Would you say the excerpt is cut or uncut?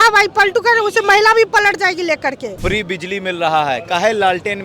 cut